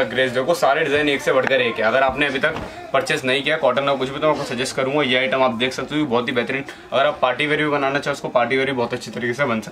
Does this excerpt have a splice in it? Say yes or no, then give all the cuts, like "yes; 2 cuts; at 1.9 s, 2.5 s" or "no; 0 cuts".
no; 0 cuts